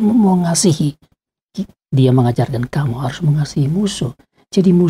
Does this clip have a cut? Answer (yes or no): yes